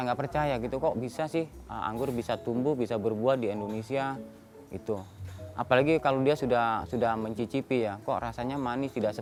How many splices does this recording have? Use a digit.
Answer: 0